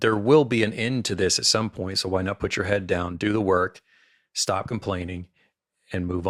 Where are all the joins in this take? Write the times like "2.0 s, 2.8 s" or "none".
none